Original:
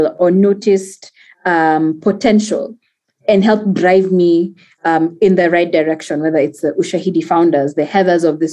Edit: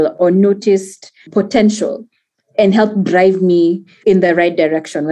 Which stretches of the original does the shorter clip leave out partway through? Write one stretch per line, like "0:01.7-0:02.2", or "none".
0:01.3-0:02.0
0:04.7-0:05.1